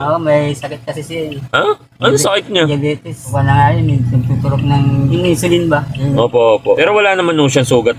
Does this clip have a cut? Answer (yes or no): yes